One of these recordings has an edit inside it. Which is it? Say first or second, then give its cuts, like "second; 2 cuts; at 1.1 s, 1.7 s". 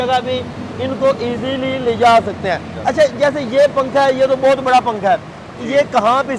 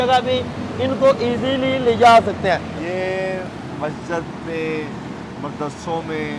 second; 1 cut; at 2.7 s